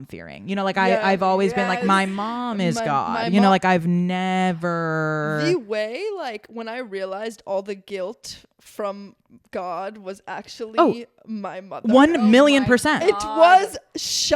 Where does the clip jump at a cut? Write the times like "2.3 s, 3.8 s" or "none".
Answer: none